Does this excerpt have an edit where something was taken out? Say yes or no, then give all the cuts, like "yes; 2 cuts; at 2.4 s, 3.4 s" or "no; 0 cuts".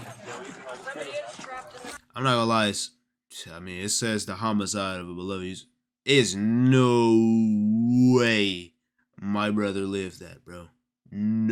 no; 0 cuts